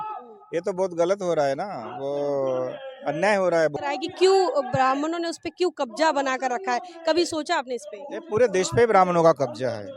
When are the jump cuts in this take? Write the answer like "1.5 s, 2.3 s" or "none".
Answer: 3.7 s